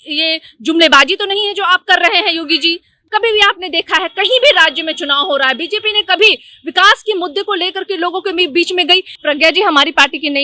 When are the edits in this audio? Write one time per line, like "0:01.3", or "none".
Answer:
0:02.9
0:09.1